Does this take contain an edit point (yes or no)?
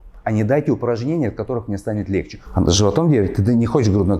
yes